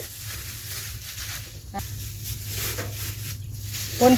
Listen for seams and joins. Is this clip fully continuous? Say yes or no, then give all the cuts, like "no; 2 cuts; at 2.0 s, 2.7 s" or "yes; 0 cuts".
no; 1 cut; at 1.8 s